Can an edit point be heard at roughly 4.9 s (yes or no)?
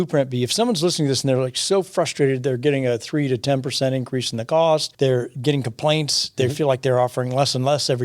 yes